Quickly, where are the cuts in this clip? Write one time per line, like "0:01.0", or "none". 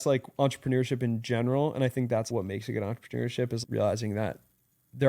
0:02.3
0:03.6